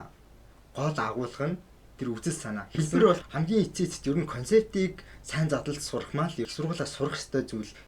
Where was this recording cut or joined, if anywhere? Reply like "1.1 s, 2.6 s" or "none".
3.3 s, 6.5 s